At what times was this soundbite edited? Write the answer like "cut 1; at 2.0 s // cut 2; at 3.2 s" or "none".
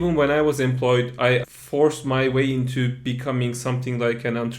cut 1; at 1.4 s